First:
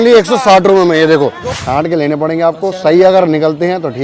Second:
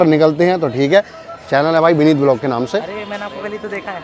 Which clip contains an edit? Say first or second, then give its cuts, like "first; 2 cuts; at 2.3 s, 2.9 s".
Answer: first; 1 cut; at 1.5 s